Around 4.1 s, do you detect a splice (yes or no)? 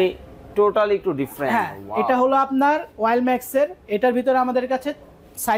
no